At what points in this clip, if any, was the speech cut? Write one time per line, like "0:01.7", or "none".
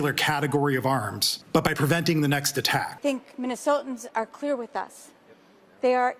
0:02.9